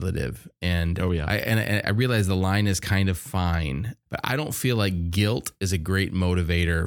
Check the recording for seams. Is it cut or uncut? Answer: cut